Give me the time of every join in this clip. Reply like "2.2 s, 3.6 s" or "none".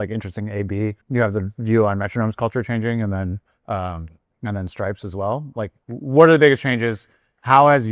1.0 s, 3.5 s, 5.8 s